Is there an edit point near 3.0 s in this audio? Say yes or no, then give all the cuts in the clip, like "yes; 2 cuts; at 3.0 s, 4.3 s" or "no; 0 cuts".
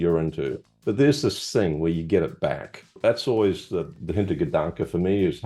yes; 1 cut; at 3.0 s